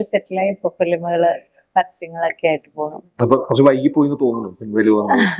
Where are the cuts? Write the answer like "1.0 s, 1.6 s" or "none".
none